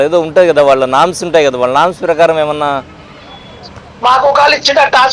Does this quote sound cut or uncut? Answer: uncut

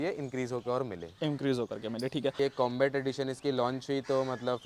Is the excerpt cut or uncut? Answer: cut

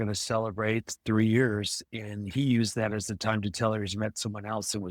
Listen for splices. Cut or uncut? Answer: uncut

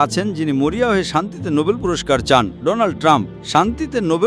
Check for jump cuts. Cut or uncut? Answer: cut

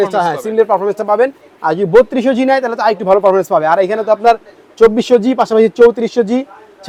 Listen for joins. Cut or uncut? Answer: uncut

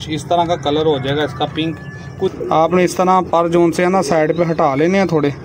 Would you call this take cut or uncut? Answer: cut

